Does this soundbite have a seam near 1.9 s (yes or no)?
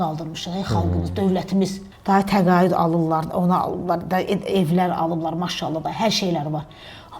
yes